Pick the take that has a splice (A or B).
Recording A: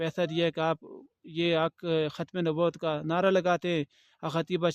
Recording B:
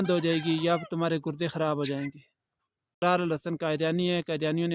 B